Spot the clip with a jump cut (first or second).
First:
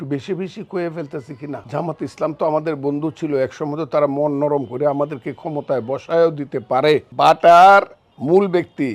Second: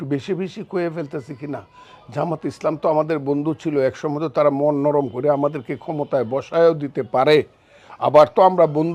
first